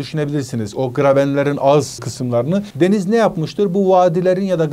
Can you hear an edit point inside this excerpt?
no; 0 cuts

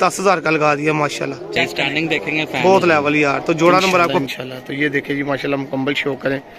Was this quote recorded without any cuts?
no; 1 cut; at 4.2 s

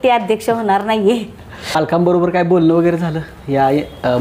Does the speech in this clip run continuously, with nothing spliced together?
no; 1 cut; at 1.8 s

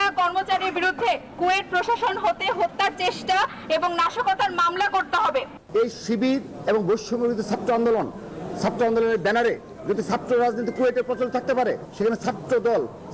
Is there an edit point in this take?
yes; 2 cuts; at 5.6 s, 11.9 s

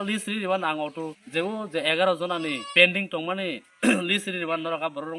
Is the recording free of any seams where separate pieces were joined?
no; 2 cuts; at 1.2 s, 2.6 s

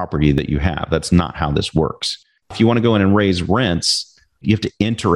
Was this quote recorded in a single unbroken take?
no; 2 cuts; at 2.5 s, 4.4 s

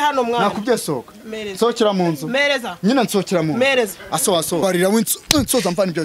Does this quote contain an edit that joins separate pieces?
yes; 1 cut; at 4.6 s

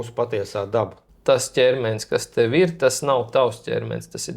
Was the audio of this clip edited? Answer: yes; 1 cut; at 1.0 s

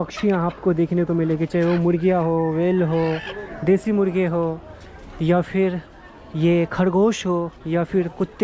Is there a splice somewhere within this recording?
no; 0 cuts

